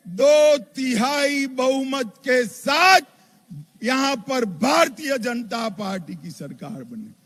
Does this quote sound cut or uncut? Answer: uncut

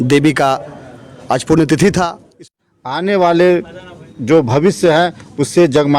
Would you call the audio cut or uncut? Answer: cut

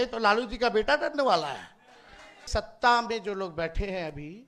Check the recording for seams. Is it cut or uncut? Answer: cut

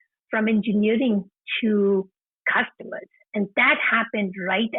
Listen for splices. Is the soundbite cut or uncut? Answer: uncut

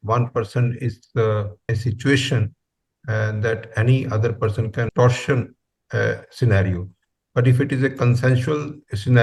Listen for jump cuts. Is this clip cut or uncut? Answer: cut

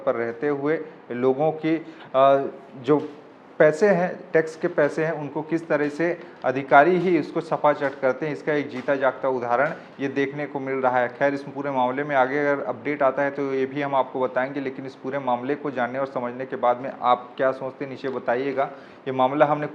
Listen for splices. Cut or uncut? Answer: uncut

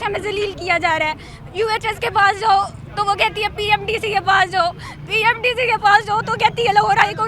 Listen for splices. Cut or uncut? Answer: uncut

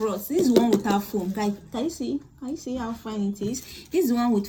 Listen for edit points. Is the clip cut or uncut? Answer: uncut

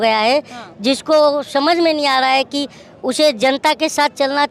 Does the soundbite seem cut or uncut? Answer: uncut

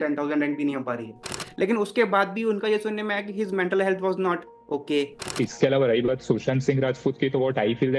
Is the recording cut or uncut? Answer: cut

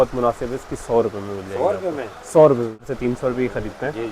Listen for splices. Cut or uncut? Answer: cut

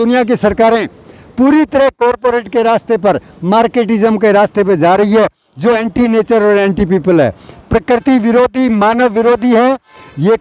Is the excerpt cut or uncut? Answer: uncut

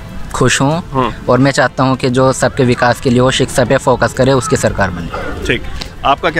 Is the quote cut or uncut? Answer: uncut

